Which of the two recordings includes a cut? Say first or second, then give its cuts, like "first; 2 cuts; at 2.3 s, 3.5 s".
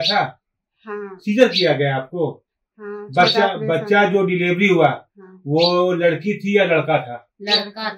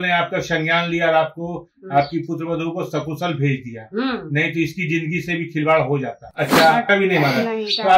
second; 1 cut; at 6.2 s